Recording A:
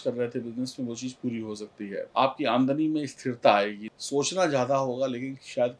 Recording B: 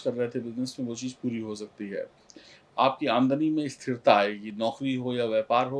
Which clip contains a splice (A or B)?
A